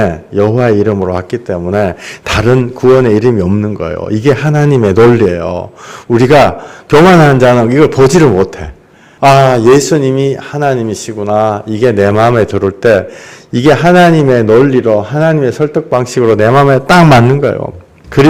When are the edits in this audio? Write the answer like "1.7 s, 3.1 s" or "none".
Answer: none